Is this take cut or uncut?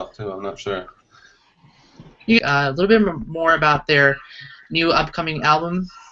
uncut